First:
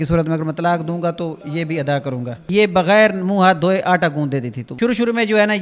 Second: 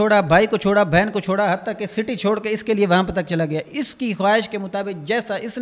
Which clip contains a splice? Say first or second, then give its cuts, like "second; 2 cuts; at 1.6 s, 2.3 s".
first; 2 cuts; at 2.4 s, 4.6 s